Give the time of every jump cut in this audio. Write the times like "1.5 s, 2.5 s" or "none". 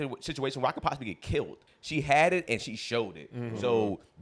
1.6 s